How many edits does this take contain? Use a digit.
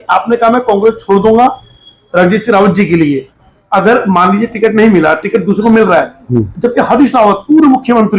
1